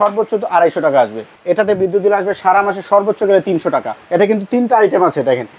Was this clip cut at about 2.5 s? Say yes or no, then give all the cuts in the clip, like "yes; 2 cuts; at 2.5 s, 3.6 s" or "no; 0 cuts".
no; 2 cuts; at 1.3 s, 4.0 s